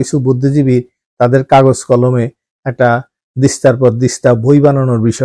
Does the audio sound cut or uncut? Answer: uncut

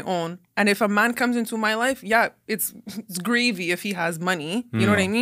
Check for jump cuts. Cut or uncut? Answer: uncut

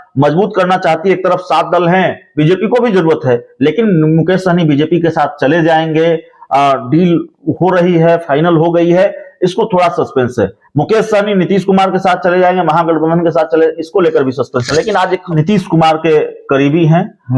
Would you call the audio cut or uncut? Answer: cut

